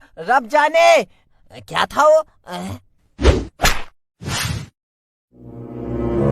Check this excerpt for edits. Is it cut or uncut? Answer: cut